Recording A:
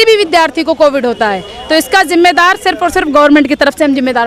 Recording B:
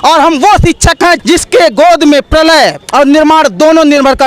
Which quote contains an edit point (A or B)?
B